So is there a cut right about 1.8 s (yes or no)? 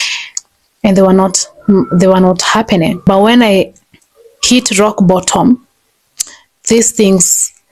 no